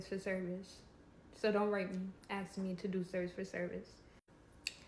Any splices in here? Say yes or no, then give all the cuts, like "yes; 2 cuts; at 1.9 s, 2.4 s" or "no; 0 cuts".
no; 0 cuts